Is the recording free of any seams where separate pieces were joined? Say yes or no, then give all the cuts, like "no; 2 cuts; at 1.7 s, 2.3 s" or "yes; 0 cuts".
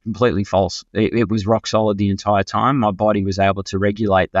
yes; 0 cuts